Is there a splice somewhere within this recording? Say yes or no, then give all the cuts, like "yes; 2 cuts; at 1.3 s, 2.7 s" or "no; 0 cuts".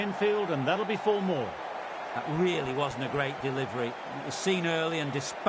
yes; 1 cut; at 2.0 s